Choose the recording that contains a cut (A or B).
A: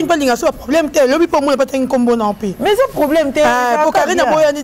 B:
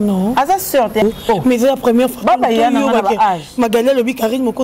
B